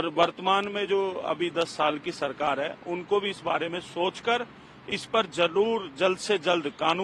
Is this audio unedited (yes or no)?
yes